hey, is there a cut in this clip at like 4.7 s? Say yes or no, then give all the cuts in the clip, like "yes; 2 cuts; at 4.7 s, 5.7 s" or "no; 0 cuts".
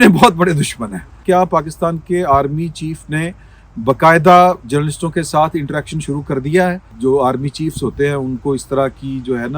no; 2 cuts; at 1.2 s, 6.9 s